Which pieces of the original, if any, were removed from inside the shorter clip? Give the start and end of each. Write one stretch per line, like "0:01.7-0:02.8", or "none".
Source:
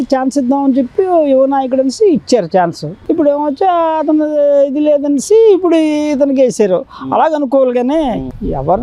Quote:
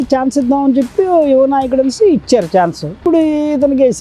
0:03.0-0:05.6